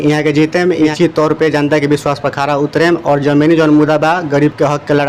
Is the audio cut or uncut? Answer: cut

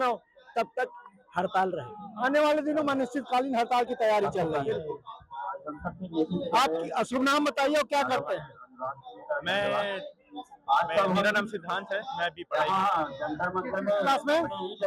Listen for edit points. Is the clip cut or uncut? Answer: uncut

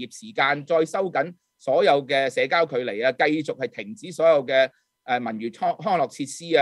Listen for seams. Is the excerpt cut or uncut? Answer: uncut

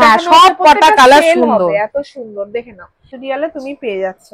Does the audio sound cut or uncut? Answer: cut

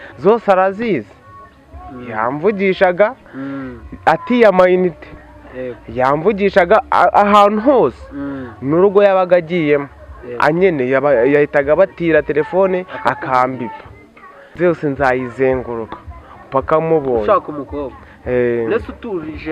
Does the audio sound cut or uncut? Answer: cut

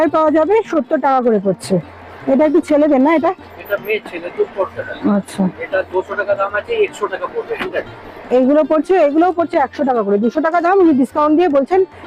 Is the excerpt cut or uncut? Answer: uncut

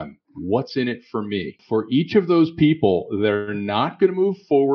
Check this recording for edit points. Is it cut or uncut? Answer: cut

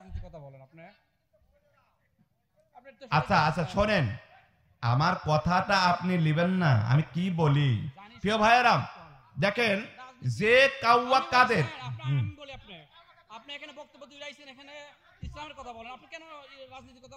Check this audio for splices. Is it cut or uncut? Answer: uncut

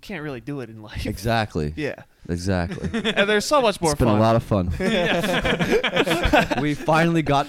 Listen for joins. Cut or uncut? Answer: cut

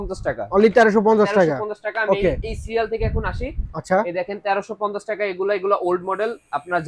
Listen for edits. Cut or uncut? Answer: uncut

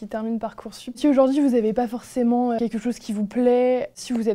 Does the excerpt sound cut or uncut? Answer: cut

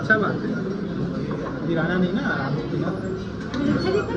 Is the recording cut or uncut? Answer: uncut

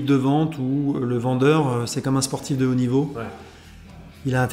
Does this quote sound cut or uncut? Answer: uncut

